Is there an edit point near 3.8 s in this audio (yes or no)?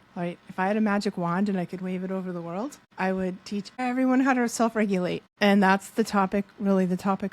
yes